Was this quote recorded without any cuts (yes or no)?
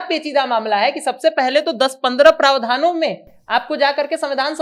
yes